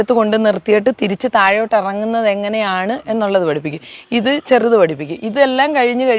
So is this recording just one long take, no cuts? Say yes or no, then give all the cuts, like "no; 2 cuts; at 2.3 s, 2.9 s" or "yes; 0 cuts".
yes; 0 cuts